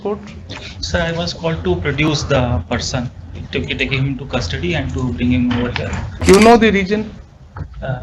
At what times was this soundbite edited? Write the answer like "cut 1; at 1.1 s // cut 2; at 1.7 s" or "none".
cut 1; at 6.1 s